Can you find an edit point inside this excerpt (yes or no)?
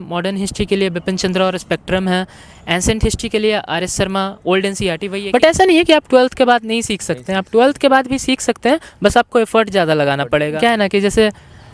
yes